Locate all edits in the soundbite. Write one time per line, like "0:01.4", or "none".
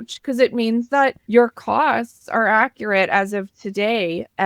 0:01.2

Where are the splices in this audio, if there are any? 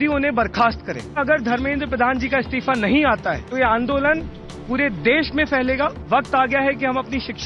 0:01.2
0:03.4
0:06.0

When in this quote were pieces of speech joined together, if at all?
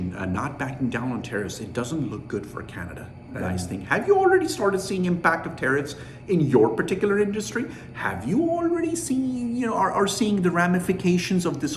0:03.6

